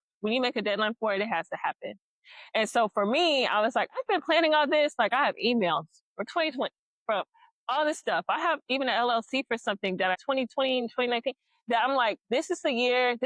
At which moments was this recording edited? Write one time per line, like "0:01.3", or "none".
0:10.2